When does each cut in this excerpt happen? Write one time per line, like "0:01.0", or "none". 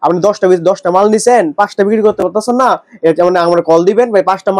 none